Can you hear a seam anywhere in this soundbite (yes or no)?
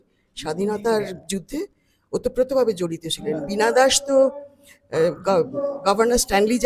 no